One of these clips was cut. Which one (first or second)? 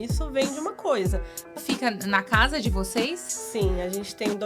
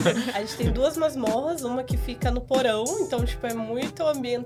first